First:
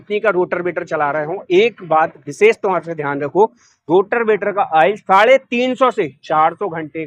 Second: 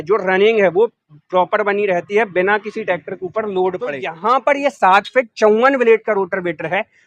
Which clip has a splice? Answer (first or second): second